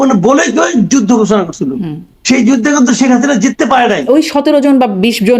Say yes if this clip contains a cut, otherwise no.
yes